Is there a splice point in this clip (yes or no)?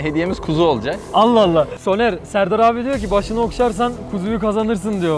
yes